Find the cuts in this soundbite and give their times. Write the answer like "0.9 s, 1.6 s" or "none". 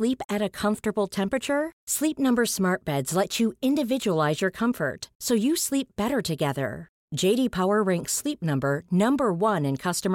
none